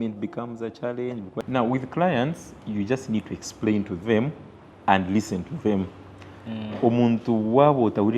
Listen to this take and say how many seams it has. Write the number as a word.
one